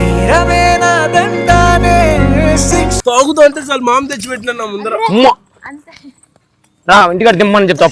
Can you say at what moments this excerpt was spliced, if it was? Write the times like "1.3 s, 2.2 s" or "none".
3.0 s